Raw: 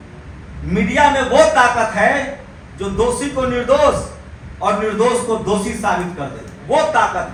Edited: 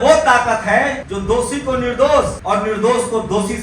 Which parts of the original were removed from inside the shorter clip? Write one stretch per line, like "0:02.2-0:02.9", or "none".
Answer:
0:02.4-0:02.8
0:04.1-0:04.5

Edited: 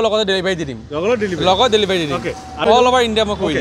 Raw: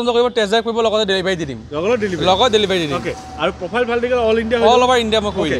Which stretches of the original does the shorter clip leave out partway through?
0:03.4-0:04.6

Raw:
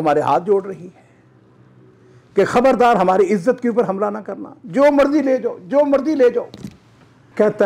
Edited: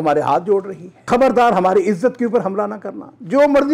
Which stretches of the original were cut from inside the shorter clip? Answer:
0:01.1-0:02.5

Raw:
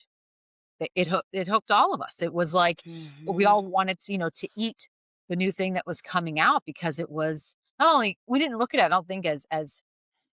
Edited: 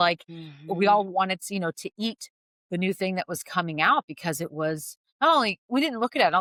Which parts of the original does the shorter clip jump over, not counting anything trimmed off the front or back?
none

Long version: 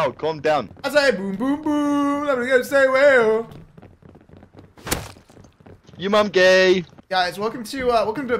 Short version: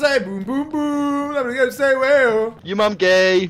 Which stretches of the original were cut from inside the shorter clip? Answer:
0:03.5-0:05.9

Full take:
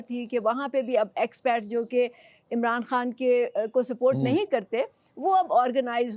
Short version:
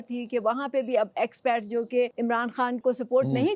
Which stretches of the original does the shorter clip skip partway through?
0:02.6-0:03.5

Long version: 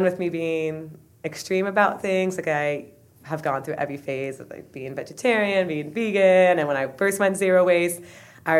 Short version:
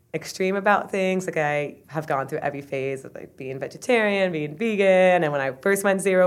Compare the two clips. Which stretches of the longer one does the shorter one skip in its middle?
0:02.9-0:03.2

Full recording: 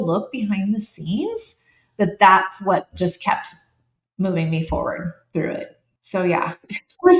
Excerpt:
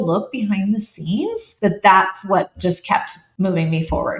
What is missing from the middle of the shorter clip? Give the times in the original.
0:01.5-0:01.8
0:03.6-0:04.0

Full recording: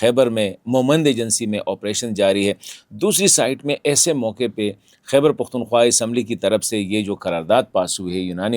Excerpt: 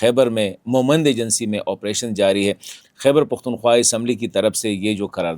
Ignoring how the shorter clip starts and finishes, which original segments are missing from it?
0:02.8-0:04.9

